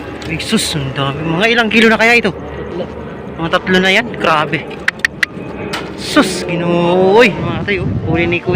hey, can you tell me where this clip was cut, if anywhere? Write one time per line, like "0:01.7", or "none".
0:07.4